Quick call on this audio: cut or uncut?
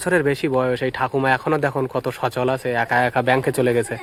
uncut